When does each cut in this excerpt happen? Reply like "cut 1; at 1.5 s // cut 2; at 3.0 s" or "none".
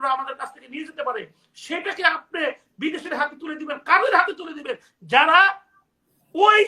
none